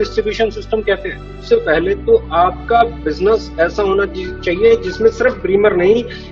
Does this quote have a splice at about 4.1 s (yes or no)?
no